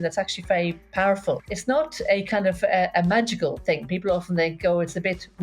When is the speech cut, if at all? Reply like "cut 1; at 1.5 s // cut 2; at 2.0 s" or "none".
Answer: cut 1; at 1.5 s